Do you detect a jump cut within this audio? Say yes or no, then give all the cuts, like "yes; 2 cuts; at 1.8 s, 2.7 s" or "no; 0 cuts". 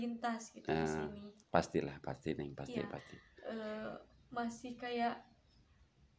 no; 0 cuts